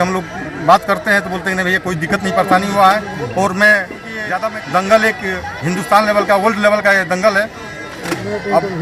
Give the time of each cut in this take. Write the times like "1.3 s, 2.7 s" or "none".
4.1 s